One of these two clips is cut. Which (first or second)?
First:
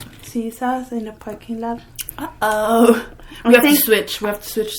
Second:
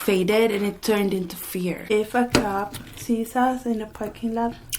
second